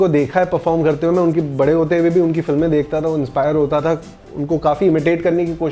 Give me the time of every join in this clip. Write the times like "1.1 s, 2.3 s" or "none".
none